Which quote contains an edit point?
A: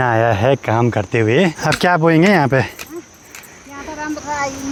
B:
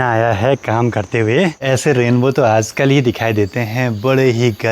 B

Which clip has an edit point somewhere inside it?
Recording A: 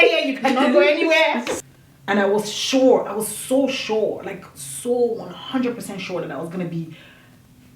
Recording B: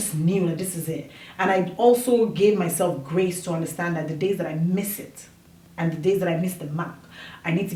A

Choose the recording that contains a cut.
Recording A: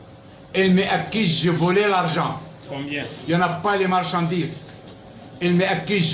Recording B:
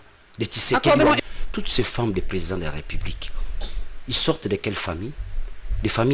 B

